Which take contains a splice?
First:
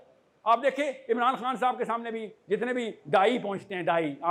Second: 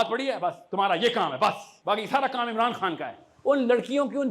second; 2 cuts; at 1.7 s, 3.2 s

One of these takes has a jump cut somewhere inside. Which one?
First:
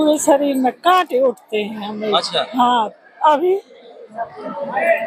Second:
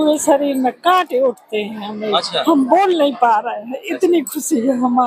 second; 1 cut; at 2.4 s

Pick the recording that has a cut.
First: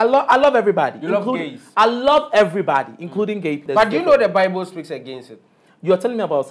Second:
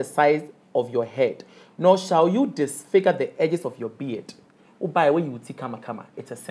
first; 1 cut; at 3.6 s

